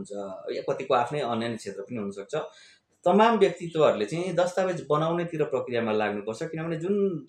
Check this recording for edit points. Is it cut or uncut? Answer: uncut